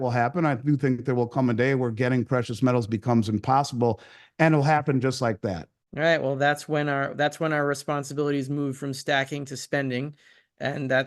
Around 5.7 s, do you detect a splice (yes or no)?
yes